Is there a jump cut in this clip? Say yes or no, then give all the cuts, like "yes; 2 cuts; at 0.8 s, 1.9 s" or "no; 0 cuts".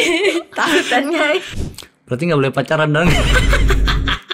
yes; 1 cut; at 1.5 s